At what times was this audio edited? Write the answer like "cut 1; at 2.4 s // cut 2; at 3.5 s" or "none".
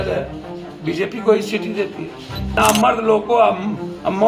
cut 1; at 2.5 s